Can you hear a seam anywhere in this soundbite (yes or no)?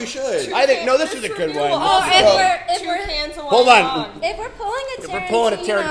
no